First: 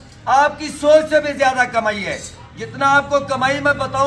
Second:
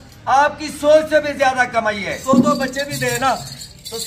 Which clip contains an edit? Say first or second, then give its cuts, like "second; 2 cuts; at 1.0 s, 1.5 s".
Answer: second; 1 cut; at 2.2 s